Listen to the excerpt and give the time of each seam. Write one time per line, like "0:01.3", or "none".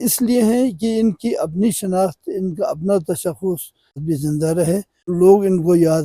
0:03.9
0:05.0